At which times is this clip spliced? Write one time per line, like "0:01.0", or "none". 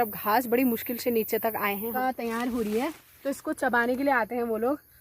0:01.9